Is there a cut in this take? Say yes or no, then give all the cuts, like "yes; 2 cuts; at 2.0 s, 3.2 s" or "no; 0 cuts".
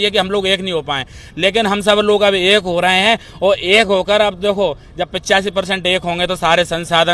no; 0 cuts